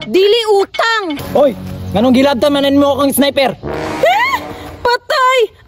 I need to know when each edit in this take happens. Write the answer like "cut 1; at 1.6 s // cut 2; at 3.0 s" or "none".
cut 1; at 1.1 s